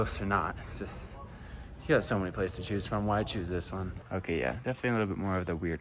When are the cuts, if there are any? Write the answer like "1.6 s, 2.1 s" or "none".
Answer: 3.9 s

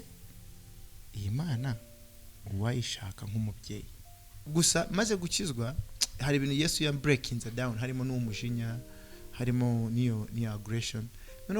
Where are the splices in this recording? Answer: 4.5 s

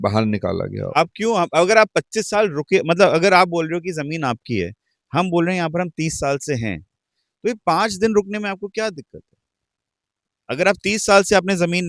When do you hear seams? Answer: 0.9 s

